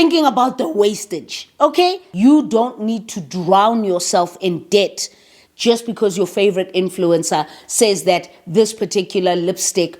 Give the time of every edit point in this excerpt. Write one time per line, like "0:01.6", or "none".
0:02.0